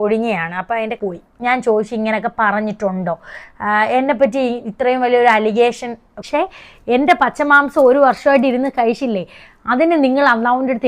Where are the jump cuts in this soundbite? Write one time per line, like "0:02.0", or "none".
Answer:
0:01.0
0:06.2